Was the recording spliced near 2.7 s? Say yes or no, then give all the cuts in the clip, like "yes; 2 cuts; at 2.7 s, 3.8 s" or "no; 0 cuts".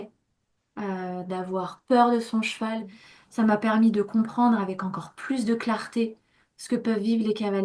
yes; 1 cut; at 2.7 s